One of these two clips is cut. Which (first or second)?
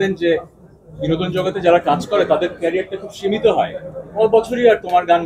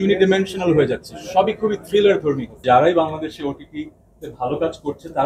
second